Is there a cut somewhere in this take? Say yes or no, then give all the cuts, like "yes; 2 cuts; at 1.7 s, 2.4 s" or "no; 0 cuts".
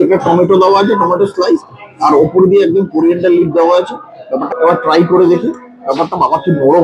yes; 1 cut; at 4.5 s